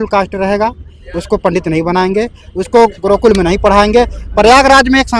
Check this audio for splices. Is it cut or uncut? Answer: uncut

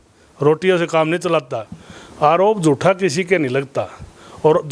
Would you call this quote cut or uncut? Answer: cut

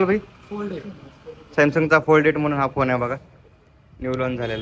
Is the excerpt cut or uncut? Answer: uncut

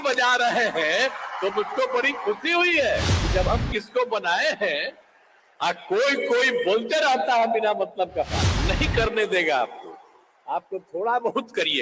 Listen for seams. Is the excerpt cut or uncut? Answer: cut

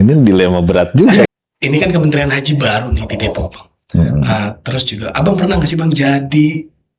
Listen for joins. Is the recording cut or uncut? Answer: cut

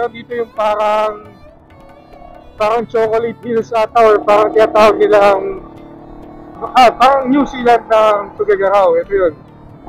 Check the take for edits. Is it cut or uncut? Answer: cut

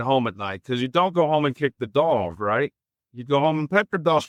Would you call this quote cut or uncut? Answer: uncut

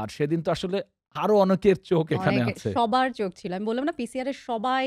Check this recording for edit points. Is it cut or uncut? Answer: uncut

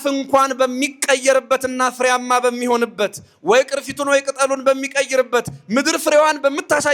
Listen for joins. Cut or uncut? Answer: uncut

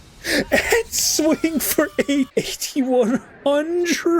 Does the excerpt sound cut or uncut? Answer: cut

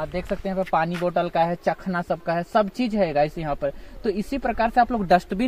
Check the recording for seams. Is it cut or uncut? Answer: uncut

